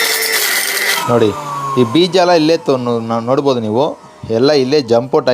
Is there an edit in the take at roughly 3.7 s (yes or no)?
no